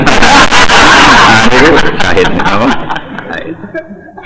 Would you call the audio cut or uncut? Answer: uncut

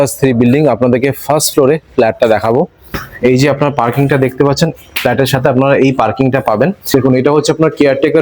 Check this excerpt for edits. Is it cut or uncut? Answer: cut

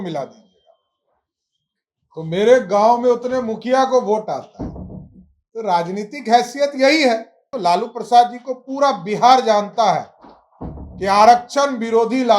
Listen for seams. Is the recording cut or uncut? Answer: cut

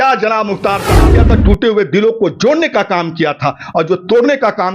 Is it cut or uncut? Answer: cut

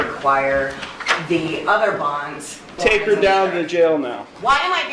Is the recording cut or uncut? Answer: cut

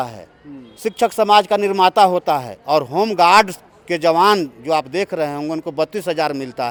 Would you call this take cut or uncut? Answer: uncut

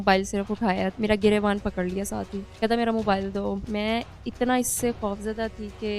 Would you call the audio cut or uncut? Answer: cut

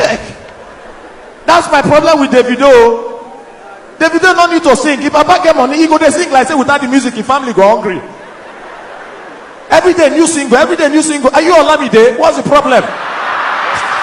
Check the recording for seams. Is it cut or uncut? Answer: uncut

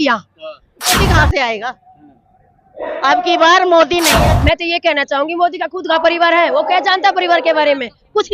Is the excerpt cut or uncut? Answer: cut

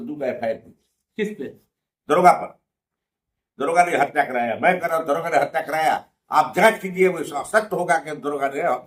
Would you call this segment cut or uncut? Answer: uncut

